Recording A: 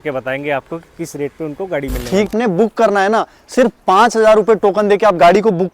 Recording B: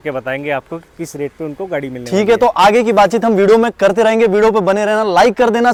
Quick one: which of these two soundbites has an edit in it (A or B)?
A